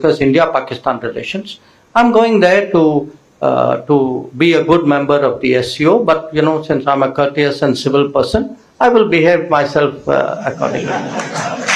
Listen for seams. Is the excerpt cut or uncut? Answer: uncut